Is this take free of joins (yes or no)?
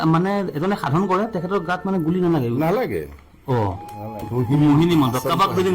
no